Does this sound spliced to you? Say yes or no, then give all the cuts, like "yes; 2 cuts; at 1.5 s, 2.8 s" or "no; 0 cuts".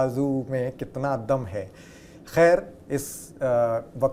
no; 0 cuts